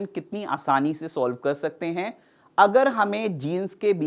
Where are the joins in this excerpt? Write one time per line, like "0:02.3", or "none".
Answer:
none